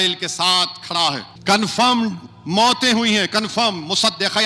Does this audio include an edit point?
yes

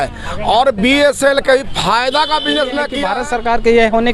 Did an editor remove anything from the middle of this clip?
yes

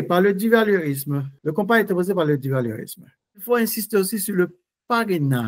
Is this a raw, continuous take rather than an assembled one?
no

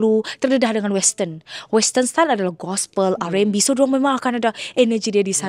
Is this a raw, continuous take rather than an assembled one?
yes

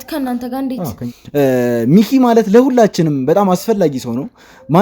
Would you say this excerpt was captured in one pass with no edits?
no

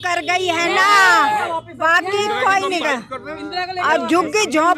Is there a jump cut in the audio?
no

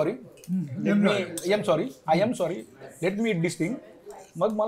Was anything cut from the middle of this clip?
no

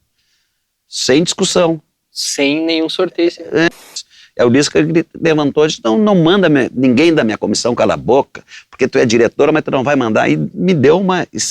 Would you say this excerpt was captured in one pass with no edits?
no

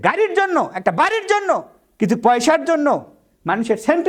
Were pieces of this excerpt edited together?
no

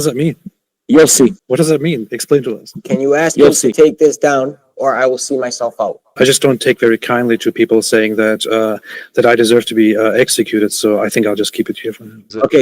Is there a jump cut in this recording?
yes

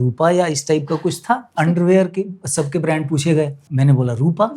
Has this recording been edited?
yes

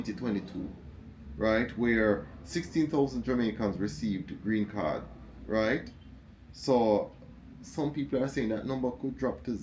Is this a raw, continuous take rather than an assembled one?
yes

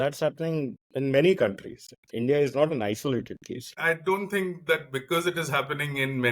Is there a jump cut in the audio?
yes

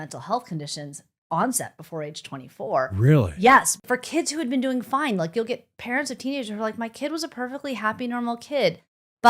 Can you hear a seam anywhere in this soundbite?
yes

